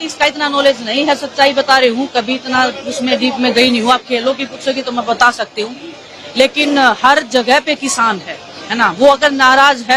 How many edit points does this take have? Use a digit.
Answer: 0